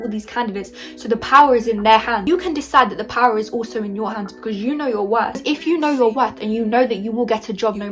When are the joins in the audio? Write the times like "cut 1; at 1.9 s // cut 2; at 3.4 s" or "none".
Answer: cut 1; at 2.2 s // cut 2; at 5.4 s